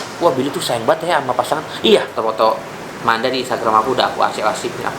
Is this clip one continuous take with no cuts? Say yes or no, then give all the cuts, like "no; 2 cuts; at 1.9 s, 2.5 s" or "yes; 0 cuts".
no; 1 cut; at 2.2 s